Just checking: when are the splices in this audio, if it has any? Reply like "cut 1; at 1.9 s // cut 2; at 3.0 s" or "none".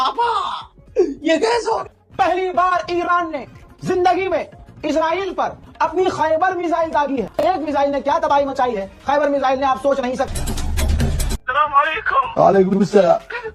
cut 1; at 1.8 s